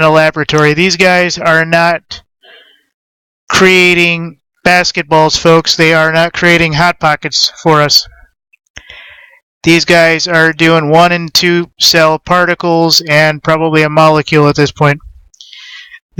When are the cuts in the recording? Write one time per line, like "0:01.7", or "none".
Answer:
none